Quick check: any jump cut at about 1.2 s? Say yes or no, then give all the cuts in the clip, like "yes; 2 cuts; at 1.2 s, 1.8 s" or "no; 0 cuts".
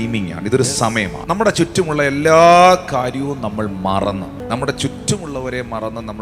yes; 2 cuts; at 1.2 s, 4.4 s